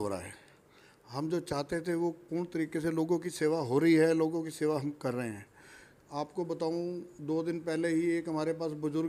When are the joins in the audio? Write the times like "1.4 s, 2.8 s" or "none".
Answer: none